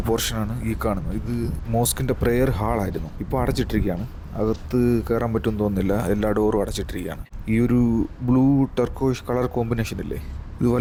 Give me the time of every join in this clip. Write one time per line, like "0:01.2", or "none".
none